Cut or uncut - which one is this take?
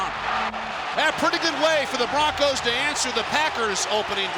uncut